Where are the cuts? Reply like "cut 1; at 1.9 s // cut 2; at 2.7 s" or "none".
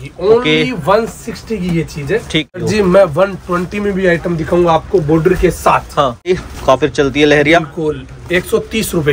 cut 1; at 2.6 s // cut 2; at 6.3 s